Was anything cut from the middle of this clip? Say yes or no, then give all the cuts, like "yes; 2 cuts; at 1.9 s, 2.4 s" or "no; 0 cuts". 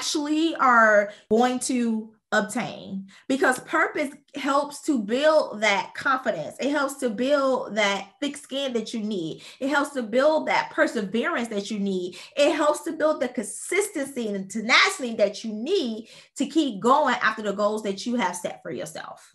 yes; 1 cut; at 1.2 s